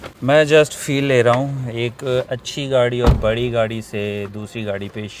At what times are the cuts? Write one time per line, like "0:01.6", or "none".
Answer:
none